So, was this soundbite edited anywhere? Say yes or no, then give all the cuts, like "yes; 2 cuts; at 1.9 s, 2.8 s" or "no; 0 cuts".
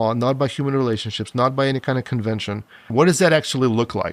yes; 1 cut; at 2.8 s